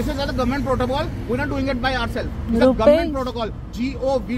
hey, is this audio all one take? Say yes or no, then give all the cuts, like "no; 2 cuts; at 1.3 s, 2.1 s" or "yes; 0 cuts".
yes; 0 cuts